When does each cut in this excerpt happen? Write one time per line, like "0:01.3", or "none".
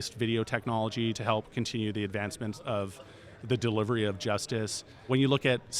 0:01.2
0:05.1

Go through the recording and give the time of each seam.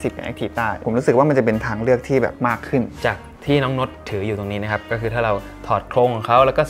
0:00.8
0:02.7

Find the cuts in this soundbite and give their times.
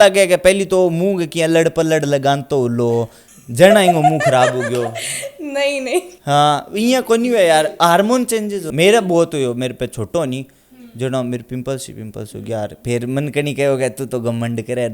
none

